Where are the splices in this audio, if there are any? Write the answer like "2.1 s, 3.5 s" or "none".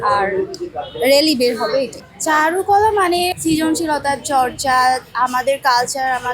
1.9 s, 3.4 s